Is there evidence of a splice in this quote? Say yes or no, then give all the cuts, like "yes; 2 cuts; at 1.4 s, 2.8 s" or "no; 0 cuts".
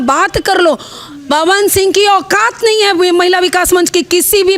no; 0 cuts